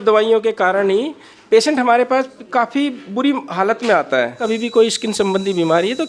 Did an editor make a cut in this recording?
yes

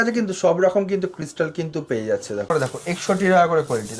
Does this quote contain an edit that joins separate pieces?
yes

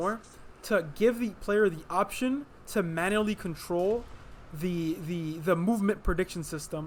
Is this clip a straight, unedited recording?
yes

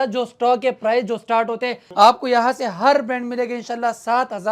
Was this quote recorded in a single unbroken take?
no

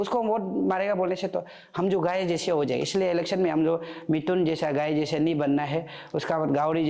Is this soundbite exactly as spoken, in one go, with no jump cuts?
yes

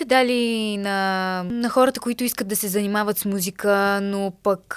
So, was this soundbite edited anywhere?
yes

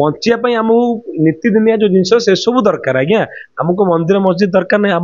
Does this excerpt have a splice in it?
no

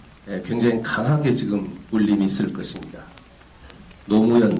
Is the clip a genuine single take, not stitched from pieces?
no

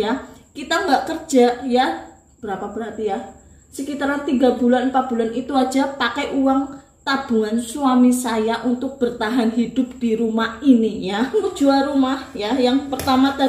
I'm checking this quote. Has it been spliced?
yes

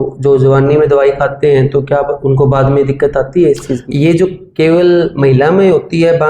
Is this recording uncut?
no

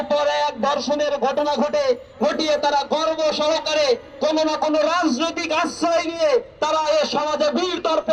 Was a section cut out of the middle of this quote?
no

